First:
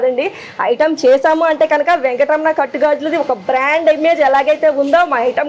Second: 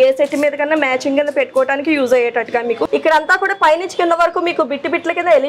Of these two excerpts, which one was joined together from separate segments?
second; 1 cut; at 2.8 s

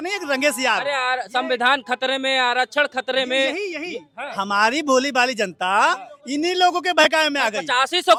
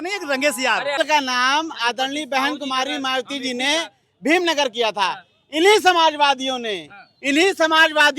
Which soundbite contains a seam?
second; 1 cut; at 1.0 s

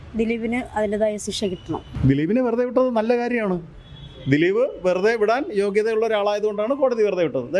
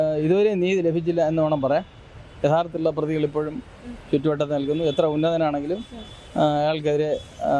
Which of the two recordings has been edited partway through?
first; 1 cut; at 1.9 s

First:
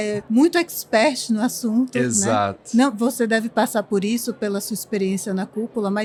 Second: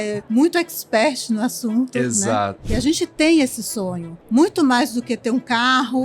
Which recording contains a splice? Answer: second; 1 cut; at 2.6 s

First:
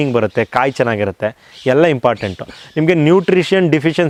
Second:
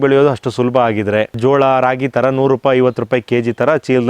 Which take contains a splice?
second; 1 cut; at 1.3 s

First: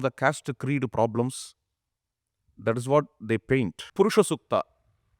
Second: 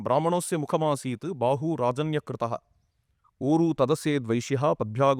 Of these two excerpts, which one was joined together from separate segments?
first; 1 cut; at 3.8 s

